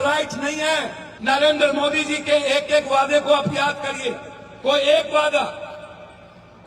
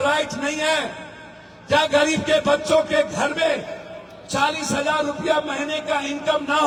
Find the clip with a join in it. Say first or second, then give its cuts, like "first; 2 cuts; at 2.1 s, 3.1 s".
first; 1 cut; at 1.0 s